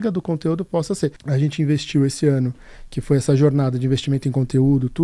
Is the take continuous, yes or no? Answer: no